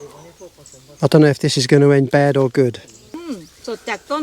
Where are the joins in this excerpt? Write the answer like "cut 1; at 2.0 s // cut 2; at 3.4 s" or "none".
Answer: cut 1; at 3.2 s